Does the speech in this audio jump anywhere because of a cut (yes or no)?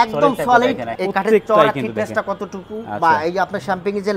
yes